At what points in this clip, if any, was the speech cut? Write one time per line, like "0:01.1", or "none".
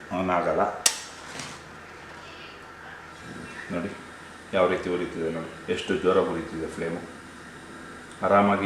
none